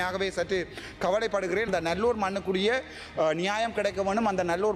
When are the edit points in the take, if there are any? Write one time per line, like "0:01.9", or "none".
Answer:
0:01.7